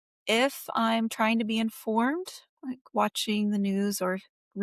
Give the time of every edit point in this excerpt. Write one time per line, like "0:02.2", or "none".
none